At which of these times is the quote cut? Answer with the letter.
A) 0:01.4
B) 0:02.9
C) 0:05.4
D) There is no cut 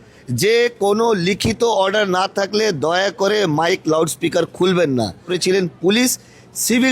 C